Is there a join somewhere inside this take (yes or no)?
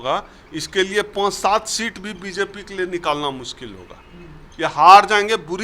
no